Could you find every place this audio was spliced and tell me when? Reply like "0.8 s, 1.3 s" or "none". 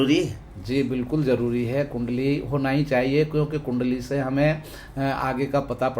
none